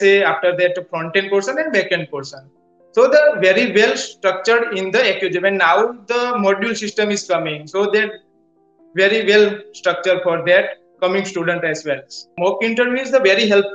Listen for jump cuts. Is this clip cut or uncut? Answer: cut